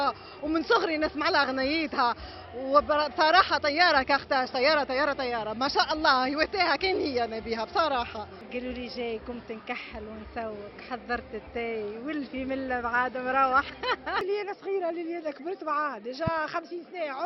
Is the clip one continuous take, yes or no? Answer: no